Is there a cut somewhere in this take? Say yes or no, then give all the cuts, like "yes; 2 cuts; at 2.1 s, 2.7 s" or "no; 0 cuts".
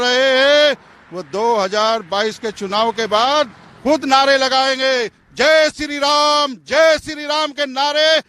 no; 0 cuts